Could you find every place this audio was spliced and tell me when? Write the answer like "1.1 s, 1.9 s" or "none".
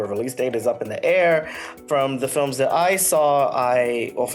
1.8 s